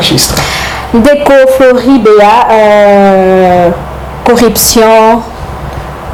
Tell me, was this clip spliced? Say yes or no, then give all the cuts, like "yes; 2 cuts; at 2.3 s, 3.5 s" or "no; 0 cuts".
no; 0 cuts